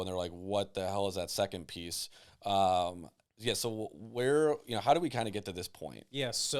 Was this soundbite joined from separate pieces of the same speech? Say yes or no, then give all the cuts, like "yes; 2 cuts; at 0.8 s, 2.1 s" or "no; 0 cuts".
no; 0 cuts